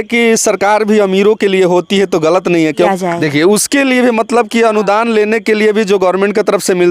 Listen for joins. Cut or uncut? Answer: cut